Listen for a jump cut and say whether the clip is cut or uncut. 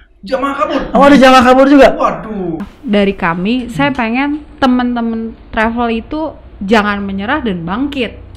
cut